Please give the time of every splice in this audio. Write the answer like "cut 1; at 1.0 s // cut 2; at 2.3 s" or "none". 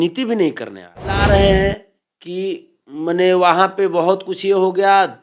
cut 1; at 1.2 s